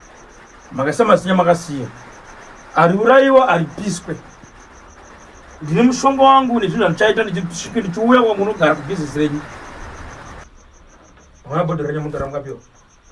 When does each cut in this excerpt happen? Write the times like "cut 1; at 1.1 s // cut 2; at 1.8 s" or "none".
cut 1; at 10.4 s